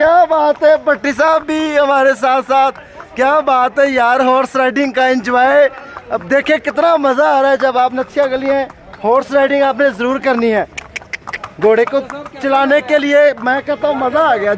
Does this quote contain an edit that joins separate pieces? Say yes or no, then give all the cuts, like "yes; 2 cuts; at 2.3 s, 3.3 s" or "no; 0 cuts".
no; 0 cuts